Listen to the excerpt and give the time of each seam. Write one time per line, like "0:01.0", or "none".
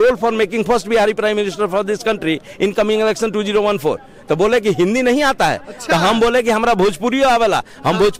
none